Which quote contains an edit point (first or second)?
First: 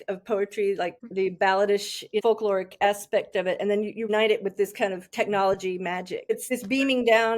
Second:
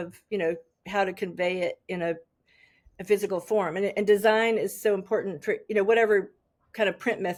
first